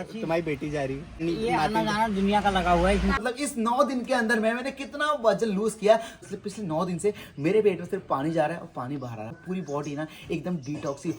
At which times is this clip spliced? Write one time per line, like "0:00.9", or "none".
0:01.2
0:03.2
0:06.1
0:09.3